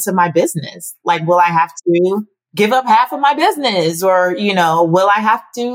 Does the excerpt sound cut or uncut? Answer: cut